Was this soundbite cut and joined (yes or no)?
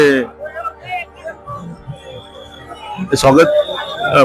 no